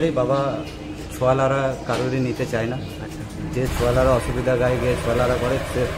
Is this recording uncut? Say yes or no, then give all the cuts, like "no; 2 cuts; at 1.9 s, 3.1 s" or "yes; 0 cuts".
yes; 0 cuts